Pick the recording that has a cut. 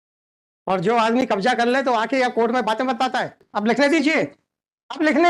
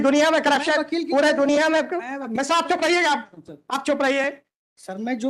first; 1 cut; at 3.5 s

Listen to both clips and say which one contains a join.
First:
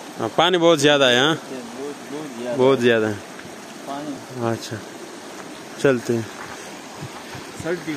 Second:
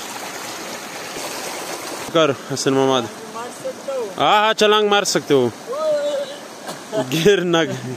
second; 1 cut; at 2.1 s

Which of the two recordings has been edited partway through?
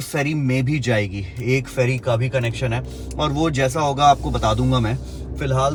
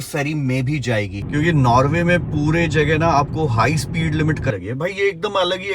second; 2 cuts; at 1.2 s, 4.5 s

